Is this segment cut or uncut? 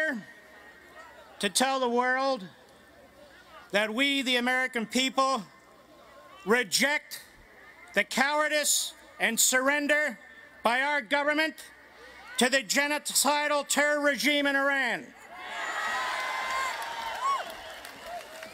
cut